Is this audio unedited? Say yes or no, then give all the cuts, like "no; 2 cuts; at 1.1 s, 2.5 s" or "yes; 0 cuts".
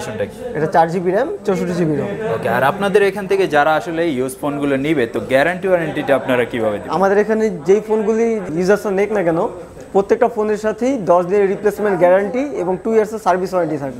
yes; 0 cuts